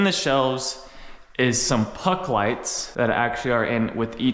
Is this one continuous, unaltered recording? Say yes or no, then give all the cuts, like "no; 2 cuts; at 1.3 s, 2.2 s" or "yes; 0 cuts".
yes; 0 cuts